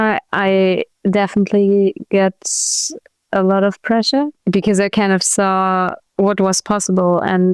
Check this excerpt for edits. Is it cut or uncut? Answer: cut